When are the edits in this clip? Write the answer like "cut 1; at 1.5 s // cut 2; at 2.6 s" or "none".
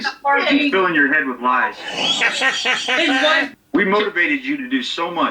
cut 1; at 3.5 s